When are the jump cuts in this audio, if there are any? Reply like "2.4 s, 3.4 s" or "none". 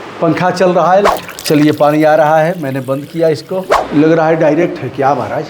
1.1 s, 3.8 s